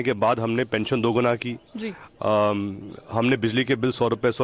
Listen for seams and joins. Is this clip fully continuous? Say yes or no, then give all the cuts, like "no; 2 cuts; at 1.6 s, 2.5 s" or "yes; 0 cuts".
yes; 0 cuts